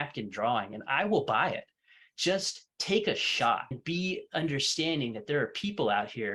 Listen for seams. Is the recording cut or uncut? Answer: cut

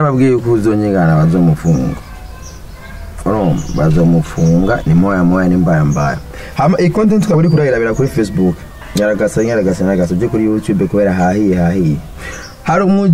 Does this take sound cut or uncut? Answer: uncut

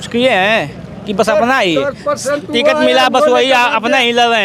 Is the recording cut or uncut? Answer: uncut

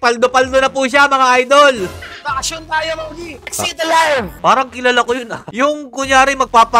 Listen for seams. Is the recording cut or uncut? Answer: cut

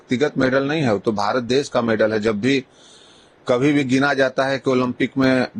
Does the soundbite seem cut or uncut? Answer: uncut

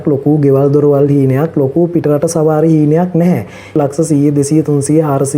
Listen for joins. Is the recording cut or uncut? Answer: cut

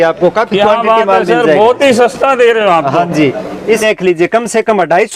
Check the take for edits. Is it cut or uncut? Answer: cut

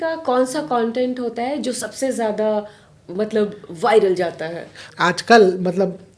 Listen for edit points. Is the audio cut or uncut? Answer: cut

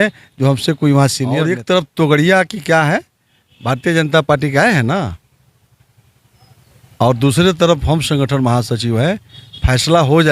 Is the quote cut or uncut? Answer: cut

